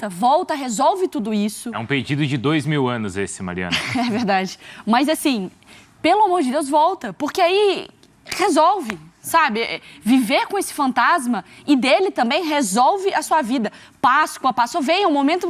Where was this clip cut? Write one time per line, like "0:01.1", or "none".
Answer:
none